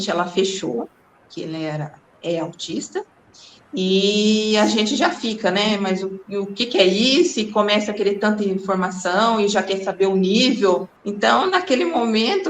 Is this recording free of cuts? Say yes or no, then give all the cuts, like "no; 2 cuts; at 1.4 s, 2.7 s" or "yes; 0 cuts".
no; 1 cut; at 11.0 s